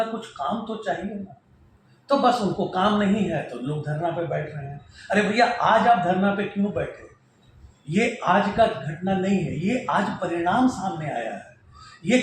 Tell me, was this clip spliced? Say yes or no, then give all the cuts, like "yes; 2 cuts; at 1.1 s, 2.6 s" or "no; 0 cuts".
no; 0 cuts